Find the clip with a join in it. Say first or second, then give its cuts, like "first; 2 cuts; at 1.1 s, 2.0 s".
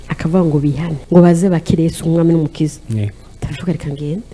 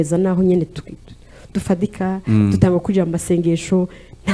first; 1 cut; at 0.9 s